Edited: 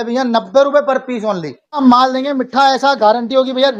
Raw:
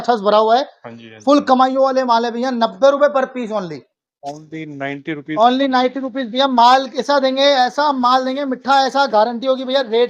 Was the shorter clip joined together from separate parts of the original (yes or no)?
yes